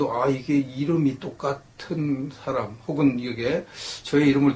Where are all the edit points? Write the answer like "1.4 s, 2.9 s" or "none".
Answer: 2.8 s